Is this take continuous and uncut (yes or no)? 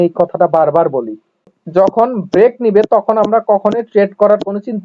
yes